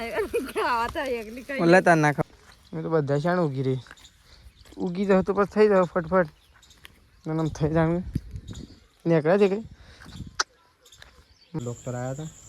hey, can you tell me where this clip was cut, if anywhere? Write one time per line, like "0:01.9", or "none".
0:02.2
0:11.6